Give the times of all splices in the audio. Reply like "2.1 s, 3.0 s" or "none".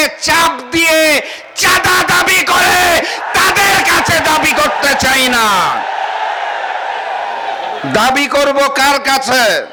none

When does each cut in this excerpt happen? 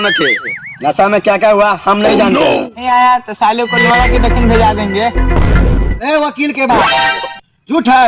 2.8 s, 5.9 s

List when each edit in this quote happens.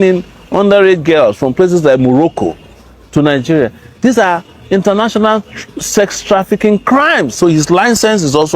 7.4 s

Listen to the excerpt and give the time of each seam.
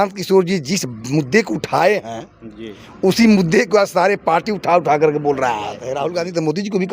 5.8 s

